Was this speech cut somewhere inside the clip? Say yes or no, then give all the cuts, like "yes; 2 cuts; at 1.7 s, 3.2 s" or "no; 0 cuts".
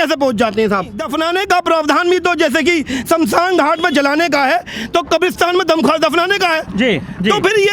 yes; 1 cut; at 1.1 s